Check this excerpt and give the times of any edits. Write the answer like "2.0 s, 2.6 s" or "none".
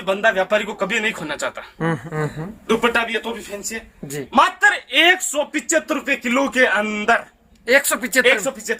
2.1 s